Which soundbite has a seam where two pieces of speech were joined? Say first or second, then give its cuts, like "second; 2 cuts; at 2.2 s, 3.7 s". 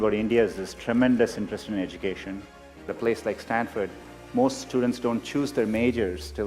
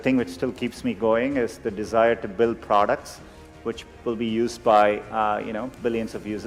first; 1 cut; at 2.9 s